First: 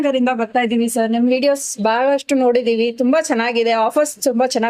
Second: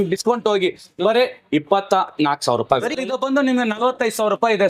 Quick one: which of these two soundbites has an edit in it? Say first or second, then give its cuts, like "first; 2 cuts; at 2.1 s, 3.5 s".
second; 1 cut; at 2.9 s